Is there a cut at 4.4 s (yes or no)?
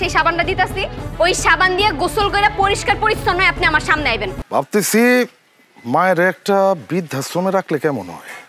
yes